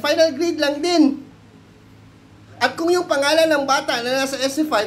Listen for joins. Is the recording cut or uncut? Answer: uncut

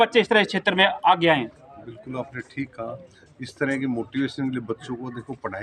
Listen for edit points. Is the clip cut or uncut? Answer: uncut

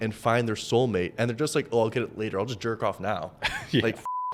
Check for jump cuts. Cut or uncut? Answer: uncut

